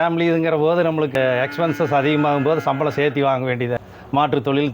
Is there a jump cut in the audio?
yes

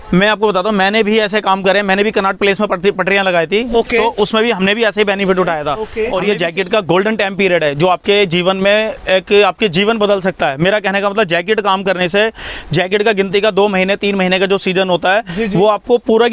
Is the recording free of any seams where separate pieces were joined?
no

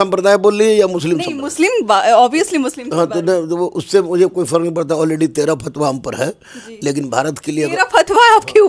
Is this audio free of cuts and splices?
yes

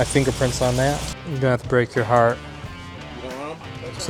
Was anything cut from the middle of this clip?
no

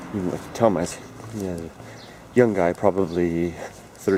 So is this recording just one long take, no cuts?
yes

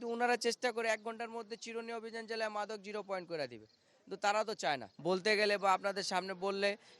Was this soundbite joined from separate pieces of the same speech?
yes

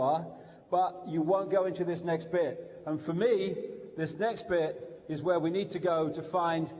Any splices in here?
yes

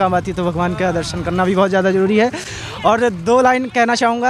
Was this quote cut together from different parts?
no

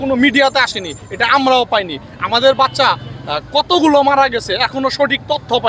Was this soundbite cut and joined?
no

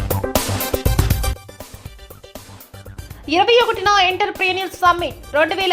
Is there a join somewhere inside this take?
yes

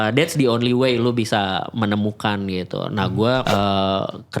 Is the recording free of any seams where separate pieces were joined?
no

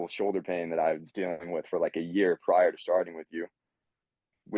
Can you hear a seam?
no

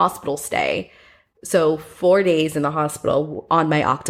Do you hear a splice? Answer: no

